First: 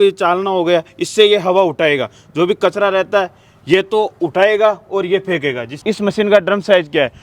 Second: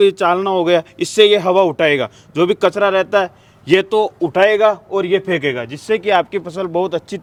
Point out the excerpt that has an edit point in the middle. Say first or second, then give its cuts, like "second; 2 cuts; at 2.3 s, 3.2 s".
first; 1 cut; at 5.7 s